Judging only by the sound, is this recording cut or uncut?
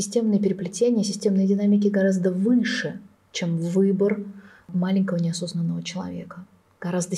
cut